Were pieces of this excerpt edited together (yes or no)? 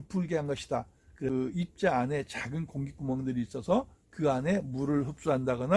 yes